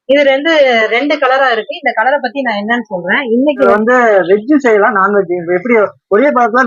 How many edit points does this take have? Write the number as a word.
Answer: one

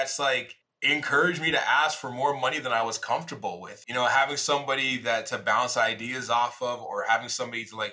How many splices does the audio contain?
zero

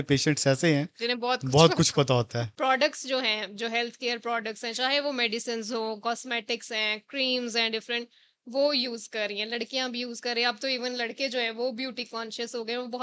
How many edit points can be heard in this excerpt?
one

